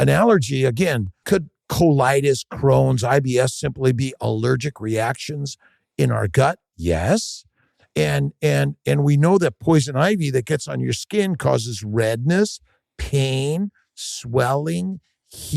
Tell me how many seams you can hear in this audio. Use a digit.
1